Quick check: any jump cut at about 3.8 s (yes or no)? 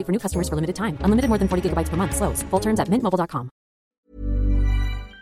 yes